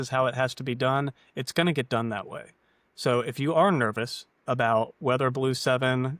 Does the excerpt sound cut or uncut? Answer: uncut